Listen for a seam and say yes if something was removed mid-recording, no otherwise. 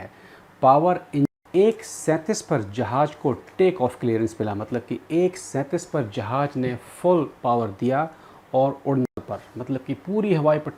yes